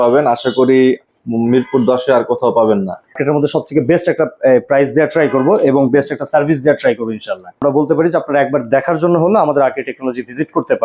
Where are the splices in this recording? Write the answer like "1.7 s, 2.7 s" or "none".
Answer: 3.1 s, 7.6 s